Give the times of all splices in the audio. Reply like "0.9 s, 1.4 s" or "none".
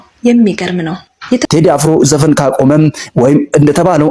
1.4 s

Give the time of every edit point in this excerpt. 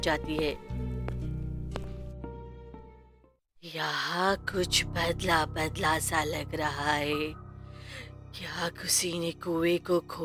none

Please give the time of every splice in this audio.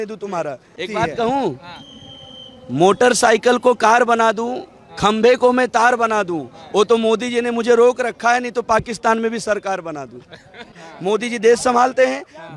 0.8 s, 10.7 s

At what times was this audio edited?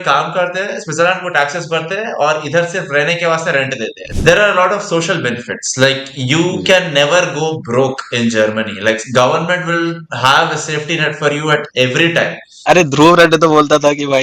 4.0 s, 12.5 s

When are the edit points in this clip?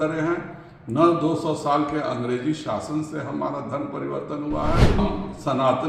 5.0 s

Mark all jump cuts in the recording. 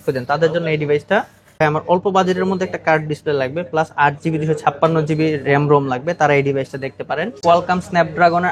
1.5 s, 7.4 s

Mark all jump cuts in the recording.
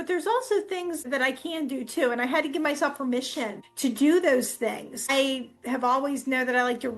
1.0 s, 3.6 s, 5.1 s

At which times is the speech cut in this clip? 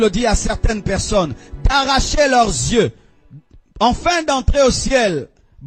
none

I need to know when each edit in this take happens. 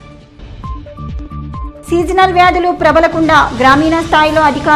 1.3 s

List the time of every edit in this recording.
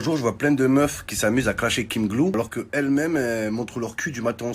2.3 s

